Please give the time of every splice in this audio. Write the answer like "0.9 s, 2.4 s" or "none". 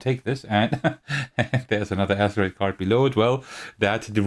none